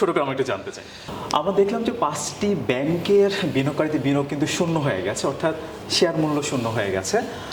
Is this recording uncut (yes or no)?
no